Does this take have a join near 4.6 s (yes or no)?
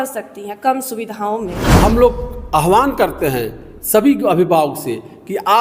no